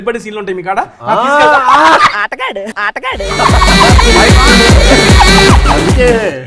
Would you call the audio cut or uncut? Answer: uncut